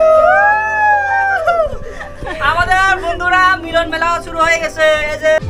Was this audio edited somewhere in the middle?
no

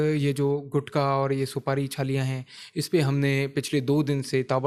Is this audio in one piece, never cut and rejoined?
yes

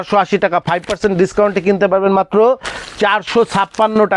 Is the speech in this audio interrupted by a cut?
no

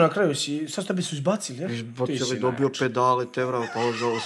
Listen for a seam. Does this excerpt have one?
no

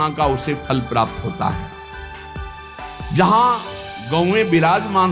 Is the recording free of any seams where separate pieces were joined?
yes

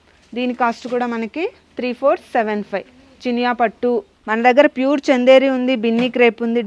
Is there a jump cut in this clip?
no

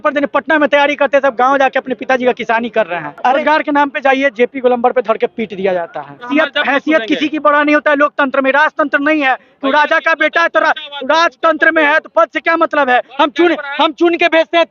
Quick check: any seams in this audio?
yes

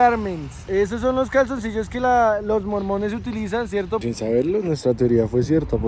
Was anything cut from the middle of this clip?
yes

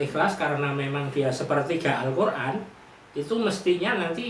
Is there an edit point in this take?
no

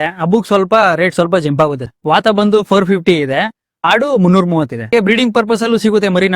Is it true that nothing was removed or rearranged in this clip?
no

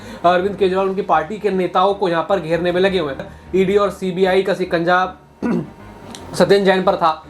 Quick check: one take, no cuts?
no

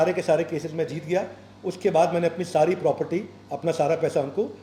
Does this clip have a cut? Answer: no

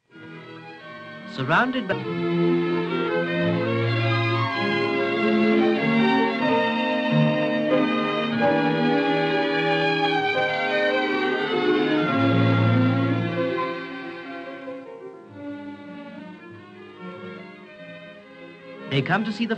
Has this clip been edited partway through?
no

